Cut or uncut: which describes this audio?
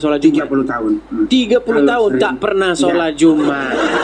uncut